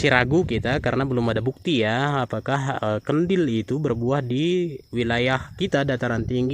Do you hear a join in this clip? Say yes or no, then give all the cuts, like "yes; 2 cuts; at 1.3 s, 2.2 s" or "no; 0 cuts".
no; 0 cuts